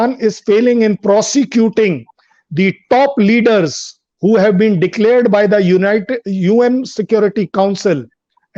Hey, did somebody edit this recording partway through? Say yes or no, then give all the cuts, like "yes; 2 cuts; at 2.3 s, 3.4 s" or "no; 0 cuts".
no; 0 cuts